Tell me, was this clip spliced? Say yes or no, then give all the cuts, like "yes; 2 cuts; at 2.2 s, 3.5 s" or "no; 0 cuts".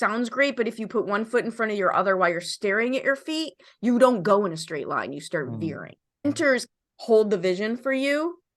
yes; 1 cut; at 6.2 s